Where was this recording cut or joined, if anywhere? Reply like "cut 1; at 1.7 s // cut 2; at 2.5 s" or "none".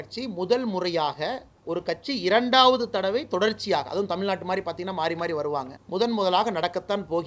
cut 1; at 5.8 s